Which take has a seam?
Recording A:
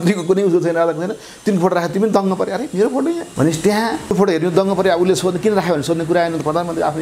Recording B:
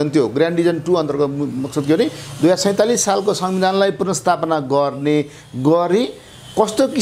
A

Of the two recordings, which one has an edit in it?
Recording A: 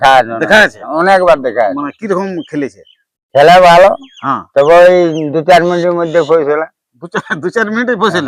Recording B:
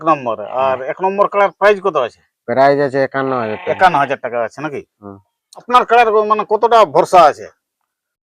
B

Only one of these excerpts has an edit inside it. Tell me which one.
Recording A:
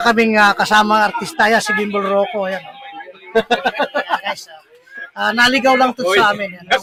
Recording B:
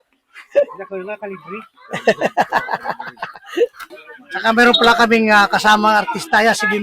B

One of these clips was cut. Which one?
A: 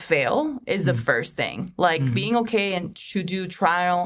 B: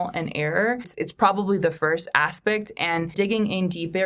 B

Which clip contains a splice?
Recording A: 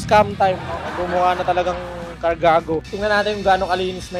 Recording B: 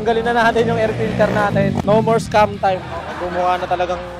A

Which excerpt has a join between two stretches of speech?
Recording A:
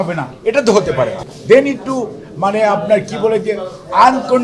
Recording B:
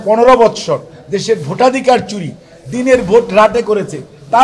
A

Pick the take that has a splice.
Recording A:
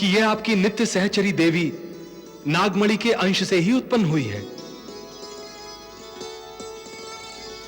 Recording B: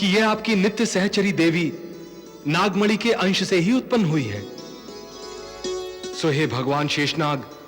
B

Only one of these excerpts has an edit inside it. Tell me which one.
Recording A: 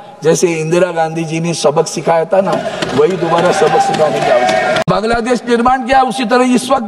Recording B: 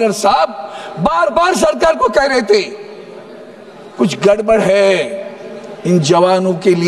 A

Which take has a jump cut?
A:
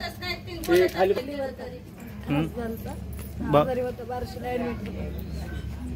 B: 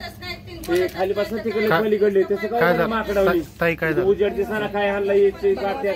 A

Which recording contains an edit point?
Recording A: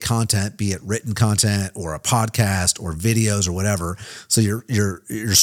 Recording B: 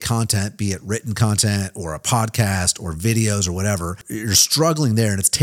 B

